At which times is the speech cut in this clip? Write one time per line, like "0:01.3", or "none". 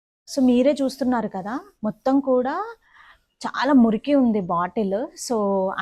none